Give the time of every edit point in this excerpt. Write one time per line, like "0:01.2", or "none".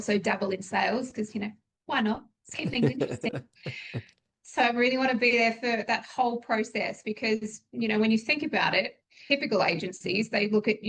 0:09.2